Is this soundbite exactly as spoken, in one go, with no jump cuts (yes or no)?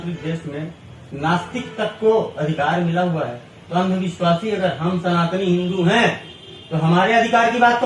yes